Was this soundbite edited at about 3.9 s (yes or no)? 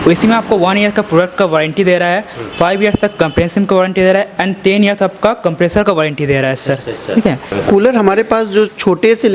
no